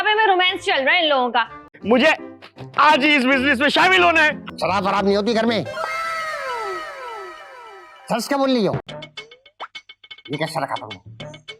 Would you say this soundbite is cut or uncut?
cut